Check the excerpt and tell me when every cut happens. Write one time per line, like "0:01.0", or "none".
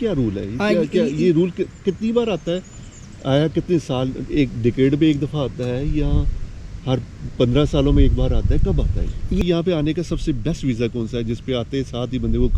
0:09.4